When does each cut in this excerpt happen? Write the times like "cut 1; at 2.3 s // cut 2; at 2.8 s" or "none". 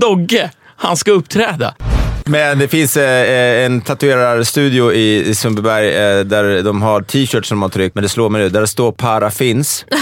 cut 1; at 2.0 s // cut 2; at 7.9 s // cut 3; at 9.0 s

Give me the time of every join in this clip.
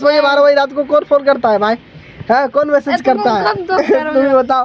none

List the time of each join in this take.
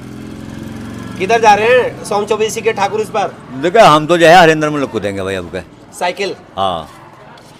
none

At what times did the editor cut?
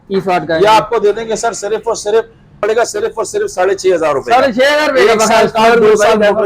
cut 1; at 2.6 s

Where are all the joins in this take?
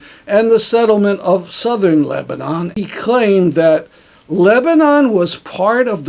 cut 1; at 2.8 s

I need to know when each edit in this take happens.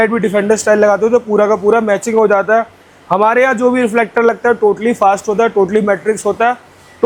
none

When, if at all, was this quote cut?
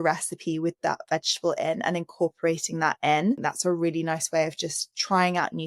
cut 1; at 3.4 s

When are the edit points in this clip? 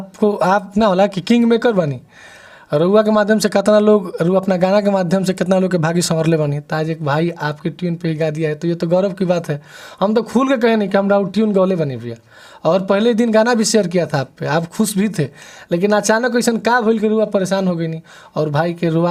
none

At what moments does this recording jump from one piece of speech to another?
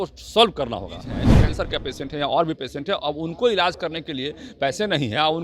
cut 1; at 1.2 s

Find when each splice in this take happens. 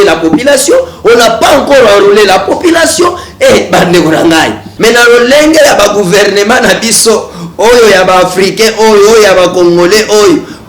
cut 1; at 4.6 s

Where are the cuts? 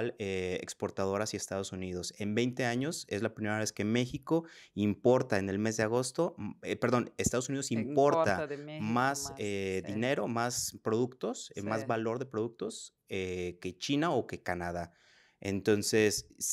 none

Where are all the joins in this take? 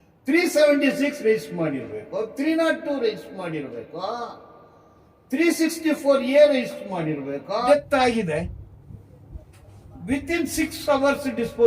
cut 1; at 7.6 s

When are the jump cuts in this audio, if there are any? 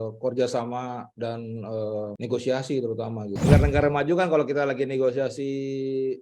cut 1; at 2.1 s // cut 2; at 3.3 s

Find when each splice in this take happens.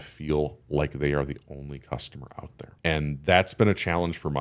cut 1; at 2.7 s

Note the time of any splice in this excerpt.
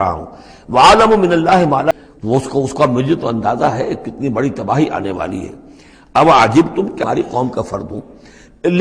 cut 1; at 1.9 s // cut 2; at 7.0 s

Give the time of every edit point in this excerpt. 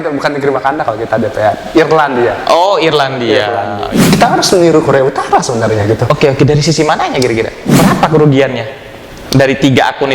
cut 1; at 3.8 s // cut 2; at 7.7 s

